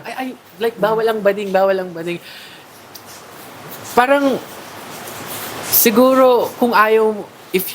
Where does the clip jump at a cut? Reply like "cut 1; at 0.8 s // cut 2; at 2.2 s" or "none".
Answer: none

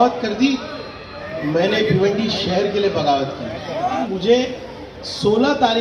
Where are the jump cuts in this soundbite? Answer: cut 1; at 4.0 s

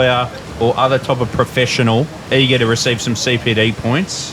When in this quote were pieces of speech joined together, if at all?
cut 1; at 2.2 s

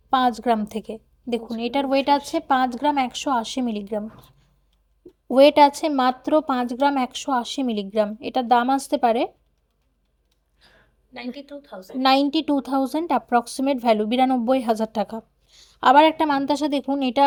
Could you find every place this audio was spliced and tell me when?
none

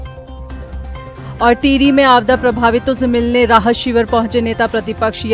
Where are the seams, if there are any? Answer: cut 1; at 1.0 s

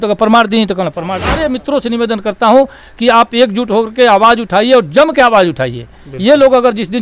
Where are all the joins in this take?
cut 1; at 1.3 s

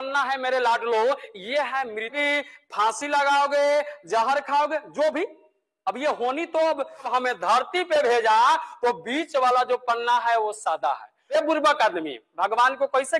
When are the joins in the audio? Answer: cut 1; at 2.1 s // cut 2; at 7.1 s // cut 3; at 11.1 s

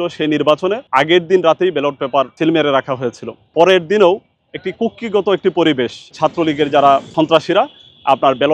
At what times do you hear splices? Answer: cut 1; at 0.8 s // cut 2; at 2.3 s // cut 3; at 3.5 s // cut 4; at 6.1 s // cut 5; at 7.1 s

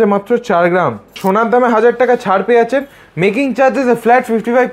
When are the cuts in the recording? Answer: cut 1; at 1.2 s

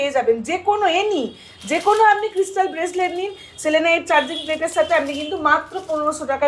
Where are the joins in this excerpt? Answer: none

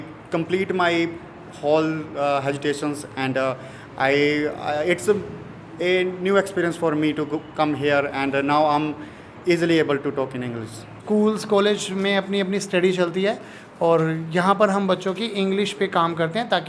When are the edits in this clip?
cut 1; at 11.0 s

